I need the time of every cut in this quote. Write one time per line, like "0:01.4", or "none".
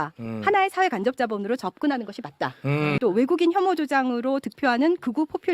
0:03.0